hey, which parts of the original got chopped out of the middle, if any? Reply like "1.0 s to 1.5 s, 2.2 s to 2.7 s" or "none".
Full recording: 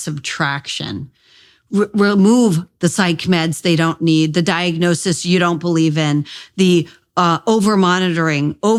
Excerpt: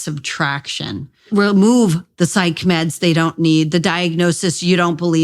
1.3 s to 1.9 s